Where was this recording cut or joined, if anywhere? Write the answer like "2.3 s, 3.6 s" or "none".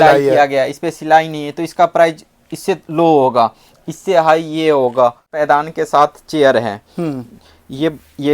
5.3 s